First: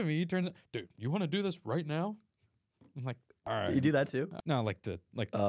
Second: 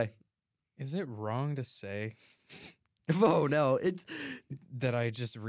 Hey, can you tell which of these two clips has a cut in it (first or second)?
first